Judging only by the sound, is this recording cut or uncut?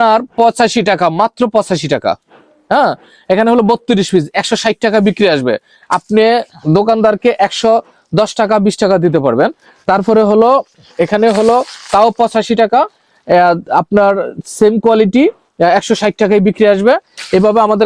uncut